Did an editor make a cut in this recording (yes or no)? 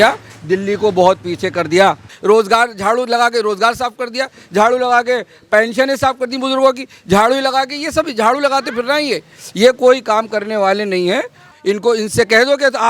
yes